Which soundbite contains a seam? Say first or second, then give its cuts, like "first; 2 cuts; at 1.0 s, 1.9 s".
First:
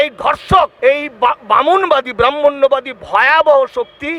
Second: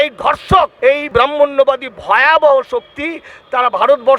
second; 1 cut; at 1.1 s